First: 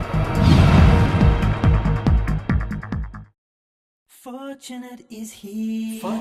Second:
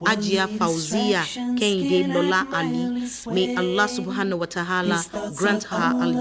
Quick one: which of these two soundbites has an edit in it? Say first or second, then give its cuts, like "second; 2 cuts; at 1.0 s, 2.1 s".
first; 1 cut; at 3.5 s